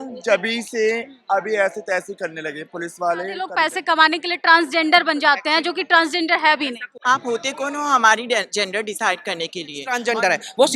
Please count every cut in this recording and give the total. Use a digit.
3